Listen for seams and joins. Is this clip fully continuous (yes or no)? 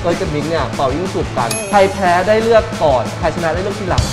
no